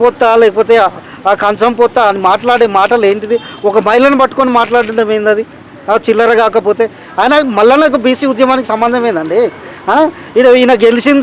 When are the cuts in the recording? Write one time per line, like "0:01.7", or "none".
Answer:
none